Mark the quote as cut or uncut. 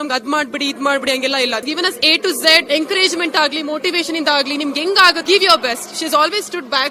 cut